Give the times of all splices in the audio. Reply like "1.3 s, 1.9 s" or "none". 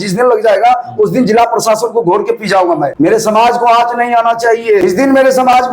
2.9 s, 4.8 s

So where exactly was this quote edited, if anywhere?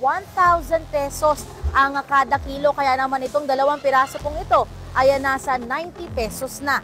none

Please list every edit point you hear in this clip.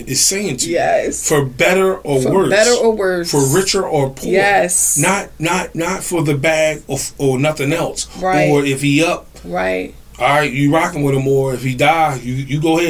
none

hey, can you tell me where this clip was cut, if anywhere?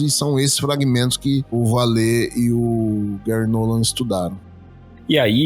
1.5 s, 4.5 s

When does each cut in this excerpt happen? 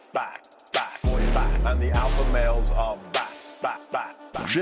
0.9 s

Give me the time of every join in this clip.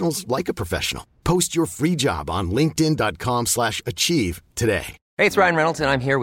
5.0 s

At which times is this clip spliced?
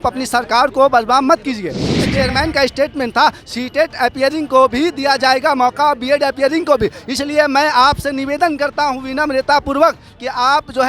2.1 s

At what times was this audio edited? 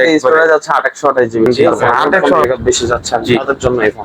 2.4 s

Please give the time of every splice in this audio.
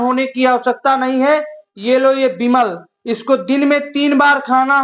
none

